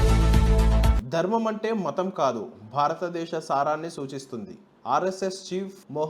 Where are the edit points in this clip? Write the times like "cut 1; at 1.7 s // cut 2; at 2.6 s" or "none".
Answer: cut 1; at 0.9 s